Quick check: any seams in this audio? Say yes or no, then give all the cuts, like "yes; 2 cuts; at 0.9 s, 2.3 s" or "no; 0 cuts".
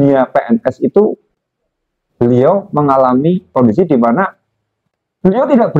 yes; 1 cut; at 3.5 s